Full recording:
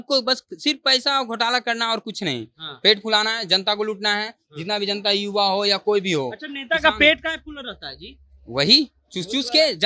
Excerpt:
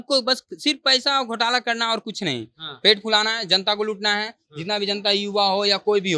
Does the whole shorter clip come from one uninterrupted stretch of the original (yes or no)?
yes